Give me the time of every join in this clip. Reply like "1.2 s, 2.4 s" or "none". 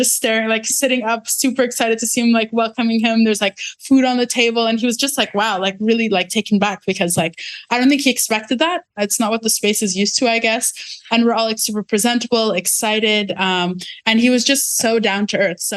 none